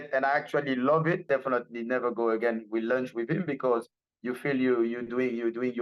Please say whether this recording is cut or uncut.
cut